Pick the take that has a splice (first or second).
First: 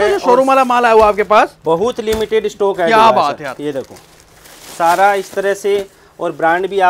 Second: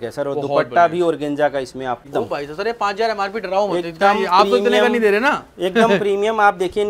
second